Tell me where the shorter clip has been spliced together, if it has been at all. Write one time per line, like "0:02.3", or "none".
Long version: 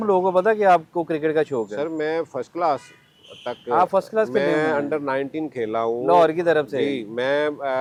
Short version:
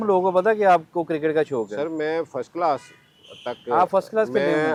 none